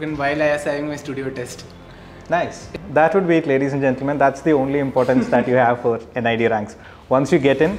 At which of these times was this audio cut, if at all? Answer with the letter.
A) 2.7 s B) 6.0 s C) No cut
A